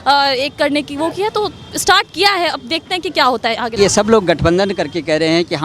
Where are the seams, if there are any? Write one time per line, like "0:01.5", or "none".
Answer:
0:03.7

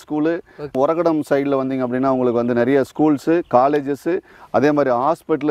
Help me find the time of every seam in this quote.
none

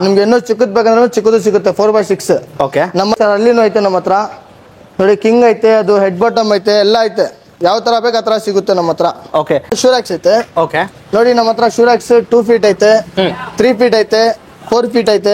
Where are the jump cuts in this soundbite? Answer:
0:03.2
0:09.8

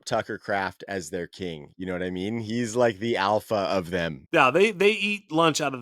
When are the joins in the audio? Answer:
0:04.2

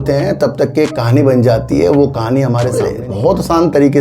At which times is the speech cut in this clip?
0:02.7

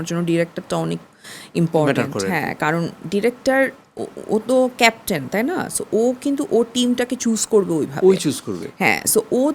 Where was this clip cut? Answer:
none

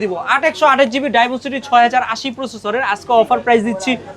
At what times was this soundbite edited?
none

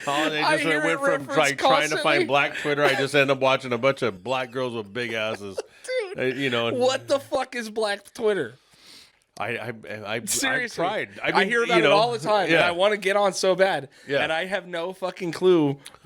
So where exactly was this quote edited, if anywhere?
none

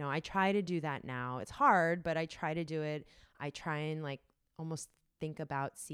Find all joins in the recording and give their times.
none

